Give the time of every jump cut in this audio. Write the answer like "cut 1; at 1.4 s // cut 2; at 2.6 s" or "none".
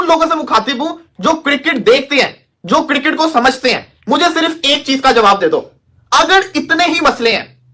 none